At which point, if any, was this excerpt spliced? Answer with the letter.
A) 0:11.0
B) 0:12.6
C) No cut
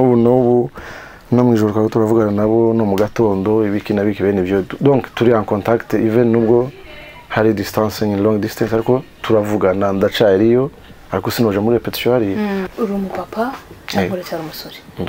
B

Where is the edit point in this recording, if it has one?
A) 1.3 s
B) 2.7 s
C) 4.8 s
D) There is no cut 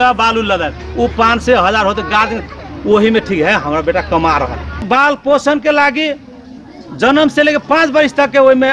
C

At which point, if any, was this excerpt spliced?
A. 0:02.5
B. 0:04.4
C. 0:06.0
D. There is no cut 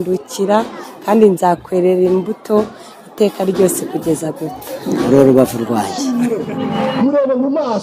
C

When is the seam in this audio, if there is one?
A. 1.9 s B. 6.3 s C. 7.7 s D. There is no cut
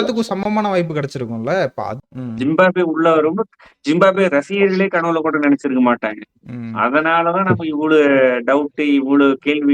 A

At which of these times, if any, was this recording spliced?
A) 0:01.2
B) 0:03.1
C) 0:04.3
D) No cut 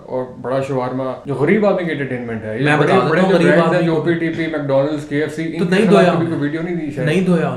A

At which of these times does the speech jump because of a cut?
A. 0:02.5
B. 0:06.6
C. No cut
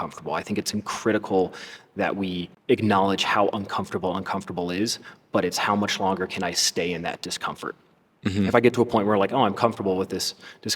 A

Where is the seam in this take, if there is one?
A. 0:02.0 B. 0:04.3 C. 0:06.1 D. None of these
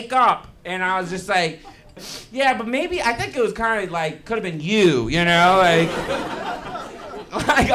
A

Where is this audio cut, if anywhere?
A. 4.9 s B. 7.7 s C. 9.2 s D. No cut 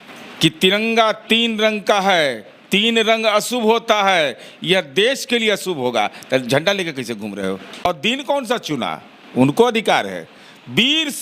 B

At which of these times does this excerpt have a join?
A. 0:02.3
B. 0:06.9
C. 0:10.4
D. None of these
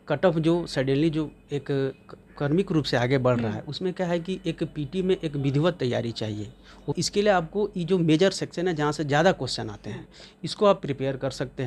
B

